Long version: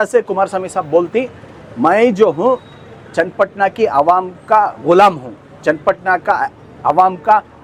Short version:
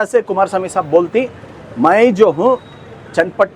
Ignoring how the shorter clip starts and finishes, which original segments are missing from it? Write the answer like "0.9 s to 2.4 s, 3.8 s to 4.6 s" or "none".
none